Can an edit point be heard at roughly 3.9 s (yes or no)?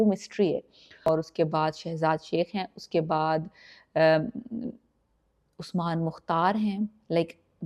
no